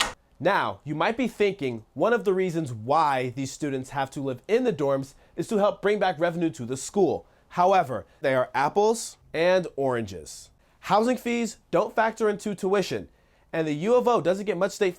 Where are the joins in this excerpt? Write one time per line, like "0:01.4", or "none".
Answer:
none